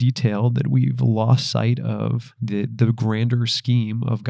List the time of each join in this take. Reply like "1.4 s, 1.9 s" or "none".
2.3 s

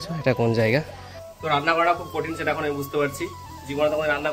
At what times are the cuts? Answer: 1.2 s

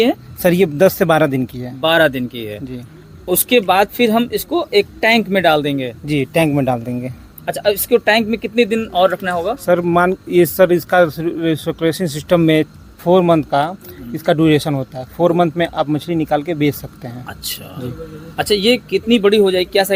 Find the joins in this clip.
none

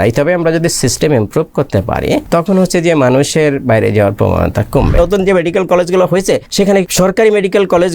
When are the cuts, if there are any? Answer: 2.2 s, 5.0 s, 6.7 s

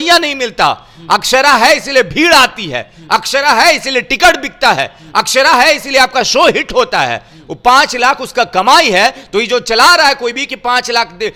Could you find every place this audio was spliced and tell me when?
none

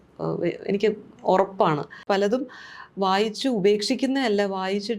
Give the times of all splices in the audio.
2.0 s

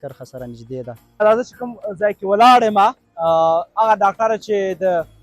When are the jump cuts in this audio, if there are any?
1.2 s

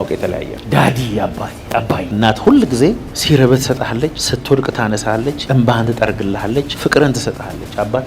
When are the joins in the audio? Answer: 2.1 s, 3.1 s, 4.3 s, 5.4 s, 6.7 s

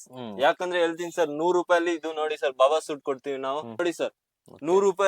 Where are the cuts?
3.8 s

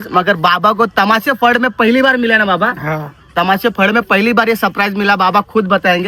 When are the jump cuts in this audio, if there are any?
none

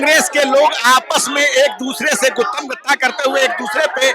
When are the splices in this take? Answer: none

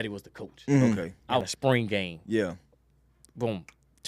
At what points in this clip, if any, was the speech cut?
1.5 s

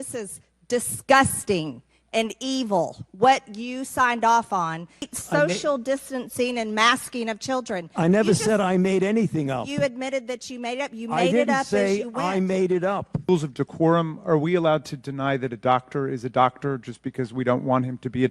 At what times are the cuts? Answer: 5.1 s, 13.3 s

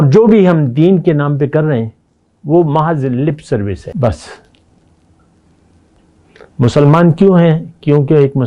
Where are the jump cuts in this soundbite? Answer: 3.9 s

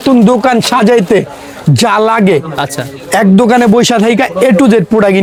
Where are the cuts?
none

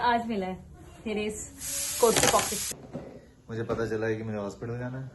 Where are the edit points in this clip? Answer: 2.7 s

